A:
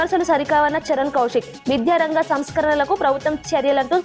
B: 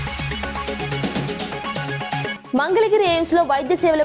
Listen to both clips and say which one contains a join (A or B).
B